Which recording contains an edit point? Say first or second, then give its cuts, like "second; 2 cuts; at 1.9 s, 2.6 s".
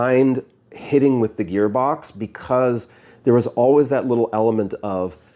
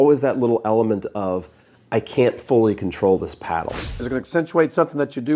second; 1 cut; at 4.0 s